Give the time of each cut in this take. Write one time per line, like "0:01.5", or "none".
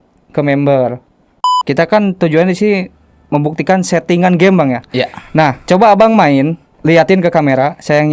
0:01.5
0:06.7